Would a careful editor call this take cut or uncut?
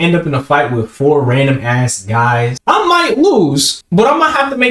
cut